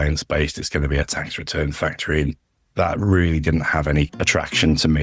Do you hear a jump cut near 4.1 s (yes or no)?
yes